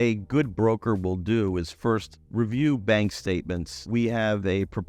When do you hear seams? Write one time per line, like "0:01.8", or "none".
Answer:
0:02.2
0:03.8